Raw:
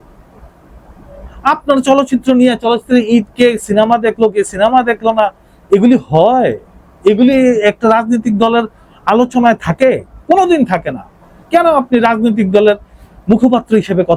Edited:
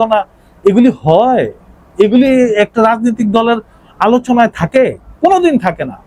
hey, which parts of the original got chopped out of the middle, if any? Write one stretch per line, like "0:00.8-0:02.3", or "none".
none